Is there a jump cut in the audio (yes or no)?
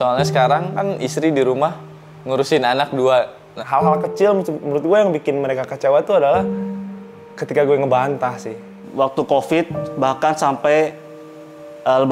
yes